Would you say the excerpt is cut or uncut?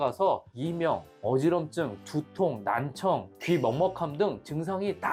uncut